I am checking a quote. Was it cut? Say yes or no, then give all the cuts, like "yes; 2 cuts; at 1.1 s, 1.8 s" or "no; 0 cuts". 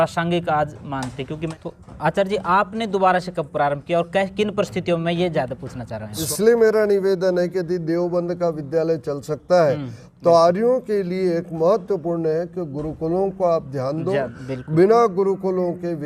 yes; 2 cuts; at 1.5 s, 6.2 s